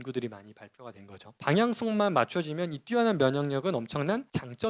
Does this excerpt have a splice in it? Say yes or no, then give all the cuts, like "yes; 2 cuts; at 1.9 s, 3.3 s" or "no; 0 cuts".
yes; 1 cut; at 1.4 s